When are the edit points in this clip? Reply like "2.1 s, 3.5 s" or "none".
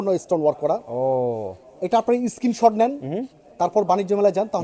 none